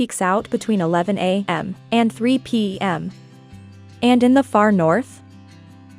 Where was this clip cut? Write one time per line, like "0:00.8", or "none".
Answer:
0:01.5